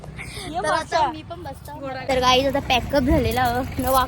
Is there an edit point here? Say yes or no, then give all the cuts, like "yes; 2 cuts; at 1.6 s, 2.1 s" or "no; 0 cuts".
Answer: yes; 1 cut; at 2.0 s